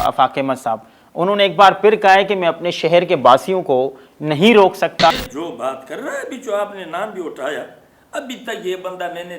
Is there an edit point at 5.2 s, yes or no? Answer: yes